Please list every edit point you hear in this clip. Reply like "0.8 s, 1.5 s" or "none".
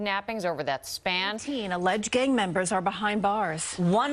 1.5 s